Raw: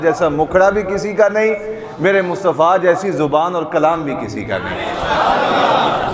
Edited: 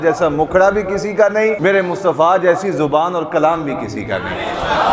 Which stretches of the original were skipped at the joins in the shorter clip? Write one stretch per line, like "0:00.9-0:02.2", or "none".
0:01.6-0:02.0